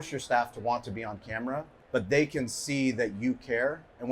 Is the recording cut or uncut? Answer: cut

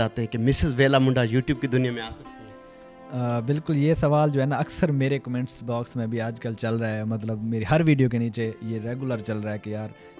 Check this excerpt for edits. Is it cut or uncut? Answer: uncut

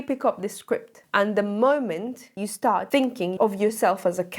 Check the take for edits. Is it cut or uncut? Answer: cut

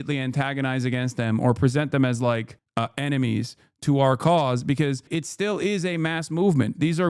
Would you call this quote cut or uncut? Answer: cut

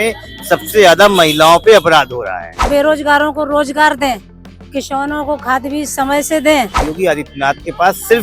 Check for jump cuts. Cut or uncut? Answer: cut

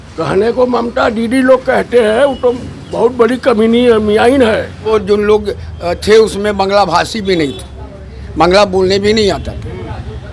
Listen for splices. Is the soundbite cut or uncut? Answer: cut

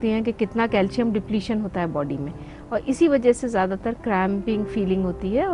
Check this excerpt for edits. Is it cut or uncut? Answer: uncut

